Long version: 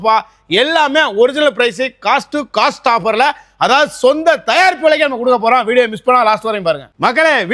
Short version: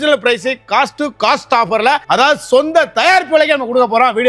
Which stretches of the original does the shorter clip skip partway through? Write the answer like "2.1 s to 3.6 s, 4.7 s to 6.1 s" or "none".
3.4 s to 3.5 s